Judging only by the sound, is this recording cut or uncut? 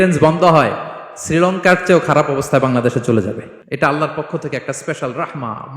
cut